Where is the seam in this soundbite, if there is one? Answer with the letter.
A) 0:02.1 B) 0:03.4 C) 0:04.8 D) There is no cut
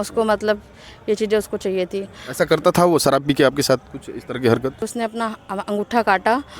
C